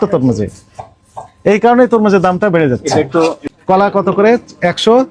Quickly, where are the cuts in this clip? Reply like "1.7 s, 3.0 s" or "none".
3.4 s

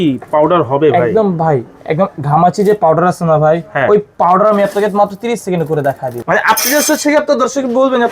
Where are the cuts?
6.1 s

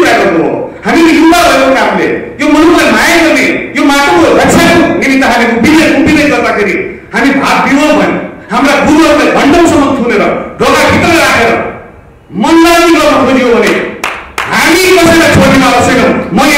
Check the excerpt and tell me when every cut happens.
none

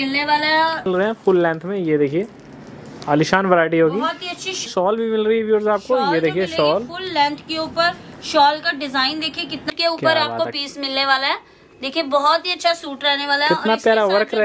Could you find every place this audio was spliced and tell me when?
0.9 s, 4.7 s, 9.7 s

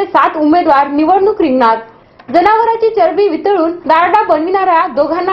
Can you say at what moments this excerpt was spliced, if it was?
none

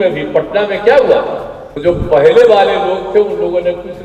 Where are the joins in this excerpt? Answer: 1.6 s

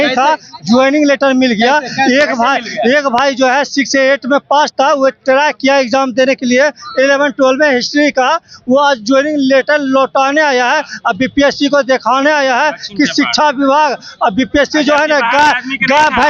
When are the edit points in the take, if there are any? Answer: none

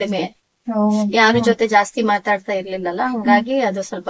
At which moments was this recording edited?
none

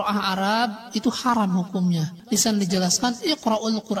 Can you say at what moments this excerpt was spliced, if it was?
2.2 s

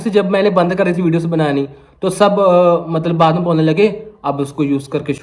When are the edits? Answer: none

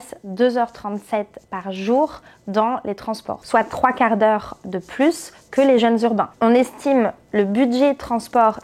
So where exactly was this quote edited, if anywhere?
3.4 s, 6.3 s

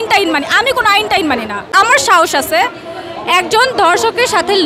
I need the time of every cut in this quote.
1.6 s

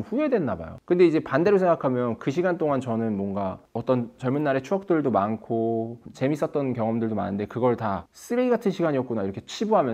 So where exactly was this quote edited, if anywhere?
none

